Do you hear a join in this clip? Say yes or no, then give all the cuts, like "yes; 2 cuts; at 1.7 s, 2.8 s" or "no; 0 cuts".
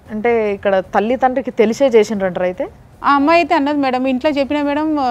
no; 0 cuts